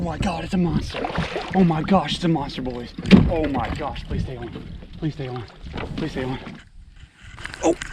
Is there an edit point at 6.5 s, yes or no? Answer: yes